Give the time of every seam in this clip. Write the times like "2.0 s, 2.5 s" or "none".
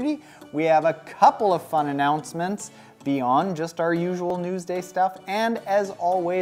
4.3 s